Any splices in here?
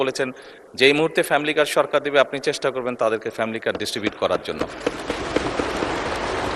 no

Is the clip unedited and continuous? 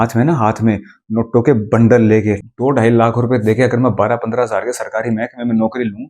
no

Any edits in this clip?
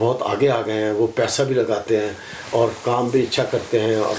no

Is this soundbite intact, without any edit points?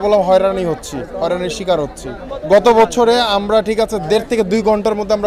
no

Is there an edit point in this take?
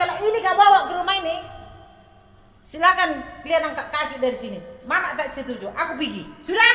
no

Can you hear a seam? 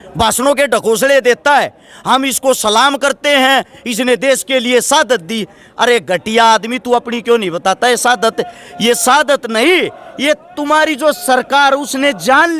no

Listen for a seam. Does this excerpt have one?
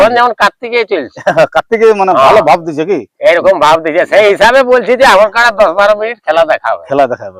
no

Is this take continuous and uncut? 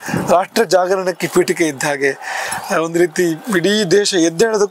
yes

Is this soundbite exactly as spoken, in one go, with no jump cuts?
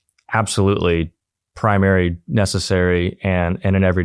yes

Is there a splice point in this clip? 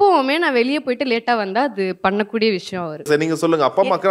yes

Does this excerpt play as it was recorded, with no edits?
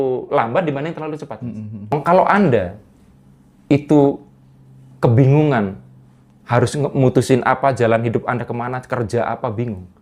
no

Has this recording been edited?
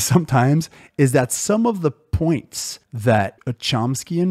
no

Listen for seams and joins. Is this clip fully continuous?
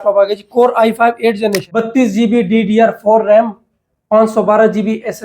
no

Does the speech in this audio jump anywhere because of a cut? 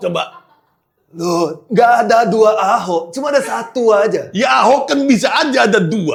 no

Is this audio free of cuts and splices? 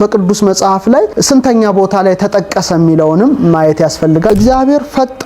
no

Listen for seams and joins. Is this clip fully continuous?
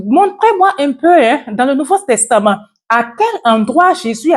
yes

